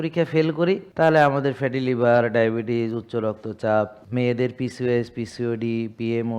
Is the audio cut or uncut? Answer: cut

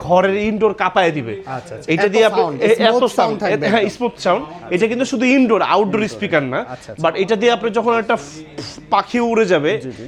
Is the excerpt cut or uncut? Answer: uncut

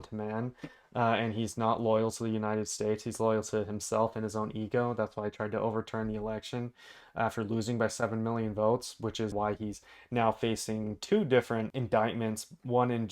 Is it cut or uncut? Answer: cut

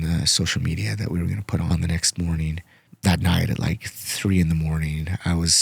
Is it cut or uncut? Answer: cut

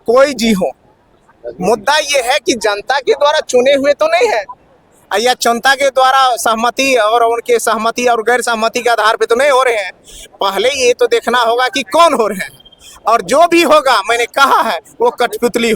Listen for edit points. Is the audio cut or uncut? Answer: uncut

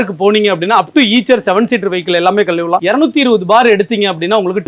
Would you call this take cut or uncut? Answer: uncut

